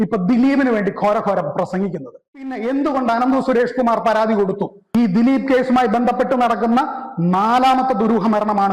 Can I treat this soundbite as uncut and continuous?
no; 1 cut; at 2.5 s

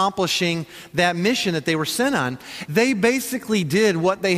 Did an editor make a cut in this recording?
yes; 1 cut; at 2.5 s

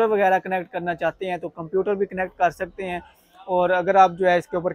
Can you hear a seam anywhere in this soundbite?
no; 0 cuts

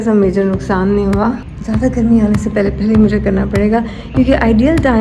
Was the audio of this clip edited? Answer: yes; 1 cut; at 1.5 s

